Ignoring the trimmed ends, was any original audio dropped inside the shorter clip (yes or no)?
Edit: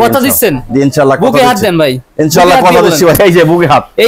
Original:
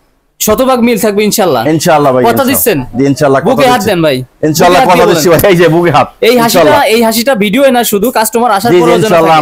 no